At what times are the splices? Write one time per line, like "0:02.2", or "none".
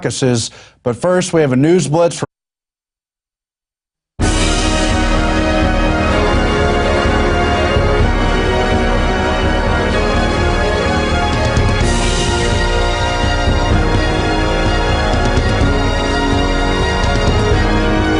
none